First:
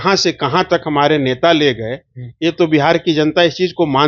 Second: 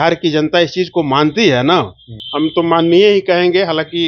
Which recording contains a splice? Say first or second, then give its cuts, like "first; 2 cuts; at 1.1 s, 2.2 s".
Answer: second; 1 cut; at 2.2 s